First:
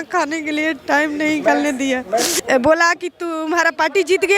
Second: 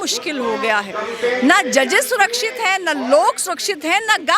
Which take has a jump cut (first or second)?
first